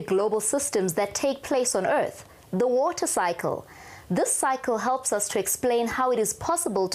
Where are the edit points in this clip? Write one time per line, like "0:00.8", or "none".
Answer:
0:01.8